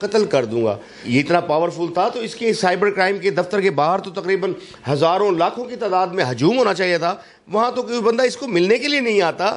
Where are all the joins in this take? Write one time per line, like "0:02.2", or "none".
0:00.9

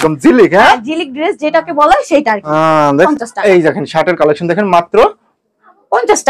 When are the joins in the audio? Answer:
0:03.1

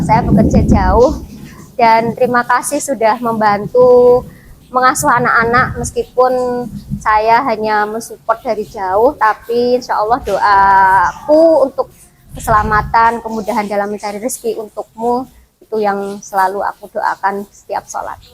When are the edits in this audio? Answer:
none

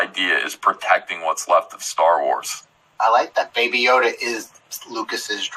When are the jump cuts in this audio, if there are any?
none

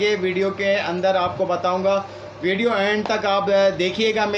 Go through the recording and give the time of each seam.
none

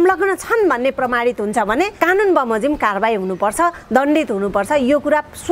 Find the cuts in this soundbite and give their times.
0:01.9

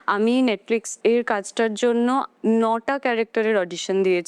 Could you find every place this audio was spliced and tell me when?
0:00.9

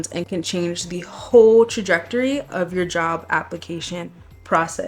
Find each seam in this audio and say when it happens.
none

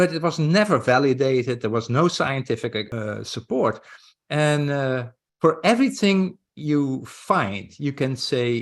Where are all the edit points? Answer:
0:02.9

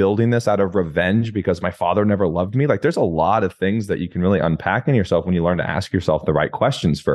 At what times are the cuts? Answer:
none

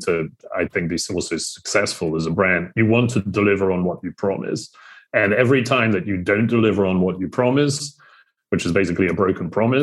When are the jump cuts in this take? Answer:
none

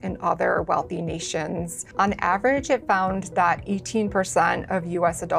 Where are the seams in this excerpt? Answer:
0:01.8

